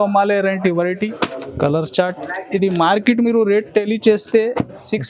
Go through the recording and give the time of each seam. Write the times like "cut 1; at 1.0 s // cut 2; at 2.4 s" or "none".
cut 1; at 1.2 s